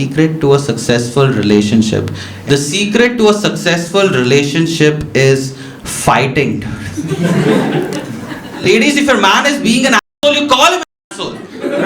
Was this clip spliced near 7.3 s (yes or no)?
no